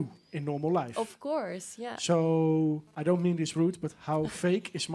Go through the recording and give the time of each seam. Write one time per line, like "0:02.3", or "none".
none